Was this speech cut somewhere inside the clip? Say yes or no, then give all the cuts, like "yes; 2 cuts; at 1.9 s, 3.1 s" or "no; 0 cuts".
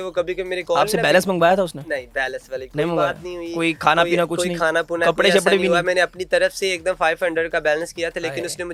no; 0 cuts